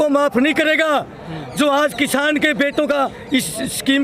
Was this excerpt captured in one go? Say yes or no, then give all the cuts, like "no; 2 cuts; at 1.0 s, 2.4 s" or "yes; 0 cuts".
yes; 0 cuts